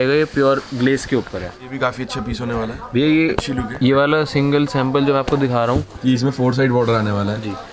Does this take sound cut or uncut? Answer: cut